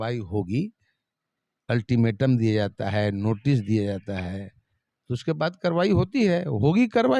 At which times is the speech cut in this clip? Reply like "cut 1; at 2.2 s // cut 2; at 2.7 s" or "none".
none

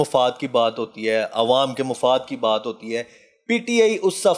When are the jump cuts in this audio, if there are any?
none

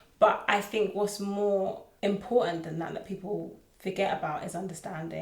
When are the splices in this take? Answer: cut 1; at 1.9 s // cut 2; at 3.6 s

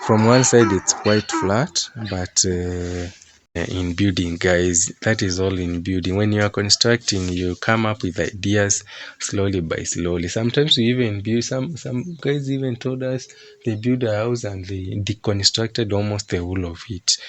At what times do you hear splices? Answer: cut 1; at 3.6 s

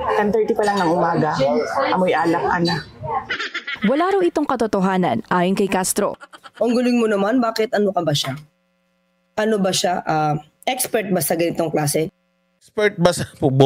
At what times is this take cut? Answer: cut 1; at 6.2 s

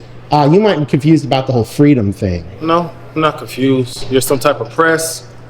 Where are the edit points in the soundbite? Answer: none

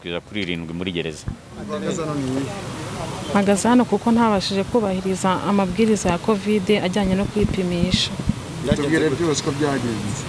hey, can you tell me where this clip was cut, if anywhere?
cut 1; at 1.7 s

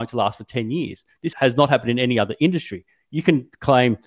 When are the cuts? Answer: cut 1; at 1.3 s

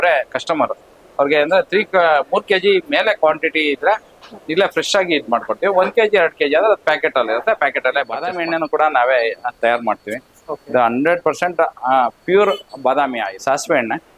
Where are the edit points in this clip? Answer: cut 1; at 8.3 s // cut 2; at 13.3 s

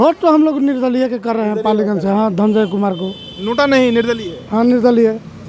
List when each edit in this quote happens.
none

